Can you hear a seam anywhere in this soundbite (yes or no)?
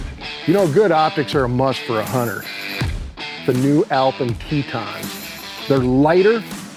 no